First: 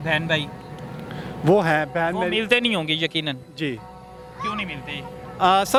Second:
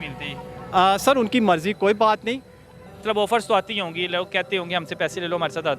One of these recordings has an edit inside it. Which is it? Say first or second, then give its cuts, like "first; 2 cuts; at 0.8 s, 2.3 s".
second; 1 cut; at 3.0 s